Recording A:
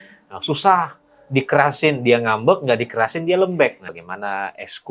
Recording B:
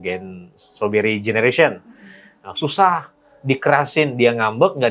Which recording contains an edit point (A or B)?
A